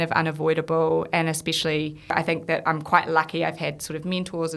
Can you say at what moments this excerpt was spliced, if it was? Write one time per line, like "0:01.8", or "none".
0:02.1